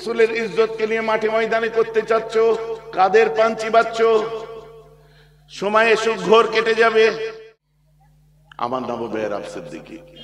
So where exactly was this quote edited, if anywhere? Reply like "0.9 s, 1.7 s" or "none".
7.4 s

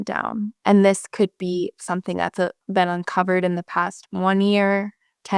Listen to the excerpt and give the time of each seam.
2.6 s

